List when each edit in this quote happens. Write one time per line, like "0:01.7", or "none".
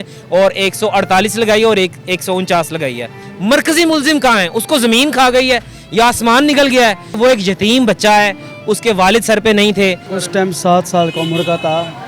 0:03.2
0:07.0
0:10.1